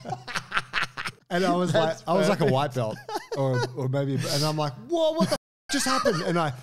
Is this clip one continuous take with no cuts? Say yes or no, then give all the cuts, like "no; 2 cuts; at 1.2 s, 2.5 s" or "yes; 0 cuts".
no; 1 cut; at 1.2 s